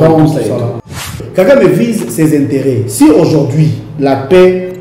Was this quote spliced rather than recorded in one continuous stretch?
yes; 1 cut; at 1.2 s

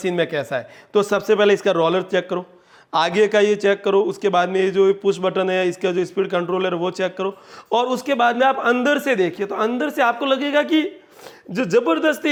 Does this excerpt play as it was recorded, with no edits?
yes; 0 cuts

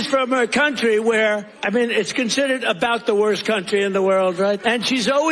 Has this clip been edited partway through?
yes; 2 cuts; at 1.5 s, 4.6 s

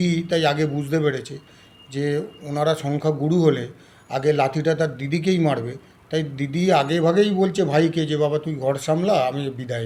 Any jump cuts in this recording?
no; 0 cuts

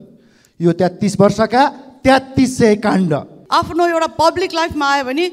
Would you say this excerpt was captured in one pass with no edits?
no; 1 cut; at 3.3 s

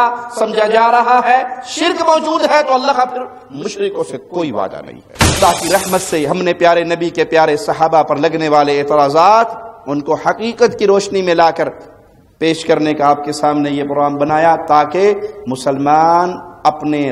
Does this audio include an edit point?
yes; 1 cut; at 5.4 s

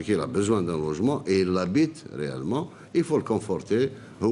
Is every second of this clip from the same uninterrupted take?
no; 1 cut; at 3.3 s

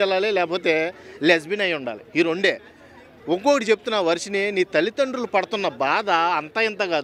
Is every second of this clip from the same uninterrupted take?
yes; 0 cuts

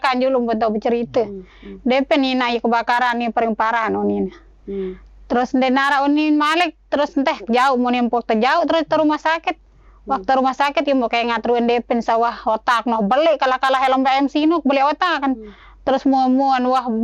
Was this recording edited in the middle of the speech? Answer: no; 0 cuts

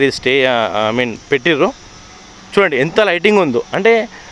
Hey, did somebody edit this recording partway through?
no; 0 cuts

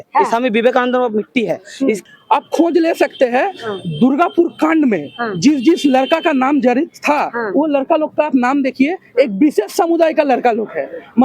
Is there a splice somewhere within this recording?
yes; 1 cut; at 2.0 s

